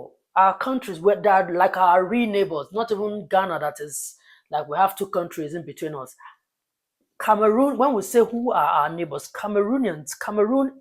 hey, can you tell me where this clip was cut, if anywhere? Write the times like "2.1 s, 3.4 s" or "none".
none